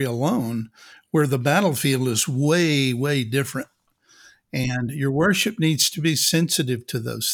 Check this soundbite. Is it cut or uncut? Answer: uncut